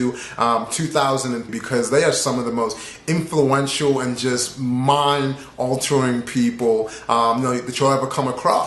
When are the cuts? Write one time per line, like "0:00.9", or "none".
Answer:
none